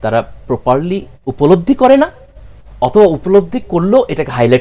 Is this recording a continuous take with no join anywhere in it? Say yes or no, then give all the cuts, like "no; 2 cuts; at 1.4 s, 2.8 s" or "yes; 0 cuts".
yes; 0 cuts